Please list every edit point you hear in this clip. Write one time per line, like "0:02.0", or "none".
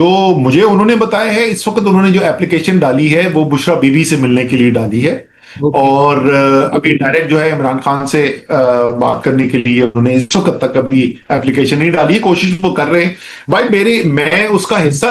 none